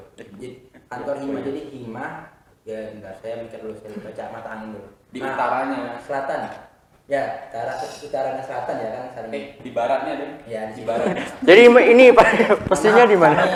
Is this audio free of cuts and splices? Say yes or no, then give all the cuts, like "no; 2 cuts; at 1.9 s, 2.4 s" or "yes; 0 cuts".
yes; 0 cuts